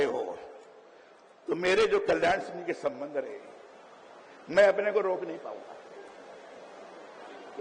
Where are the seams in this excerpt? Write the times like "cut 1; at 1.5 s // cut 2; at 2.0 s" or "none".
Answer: none